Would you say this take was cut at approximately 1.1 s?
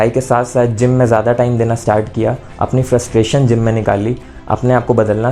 no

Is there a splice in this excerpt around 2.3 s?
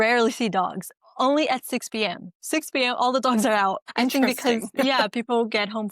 no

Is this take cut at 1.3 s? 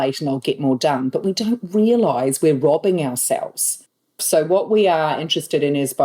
no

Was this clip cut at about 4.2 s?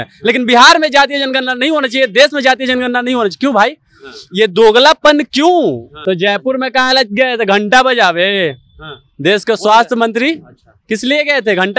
no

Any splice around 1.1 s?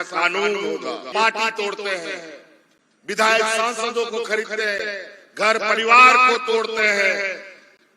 yes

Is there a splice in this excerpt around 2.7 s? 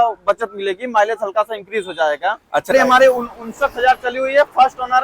yes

